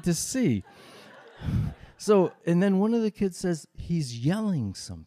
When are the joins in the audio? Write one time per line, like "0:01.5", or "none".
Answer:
0:02.4